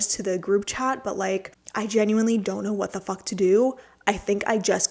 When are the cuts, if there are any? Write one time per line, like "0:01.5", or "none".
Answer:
0:01.6